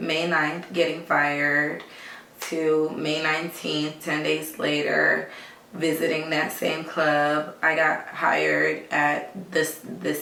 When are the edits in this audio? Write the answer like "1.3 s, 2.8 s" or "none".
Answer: none